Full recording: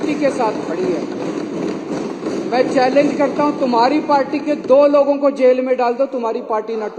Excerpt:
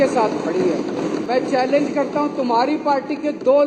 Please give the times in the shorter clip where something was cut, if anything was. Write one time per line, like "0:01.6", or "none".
0:01.2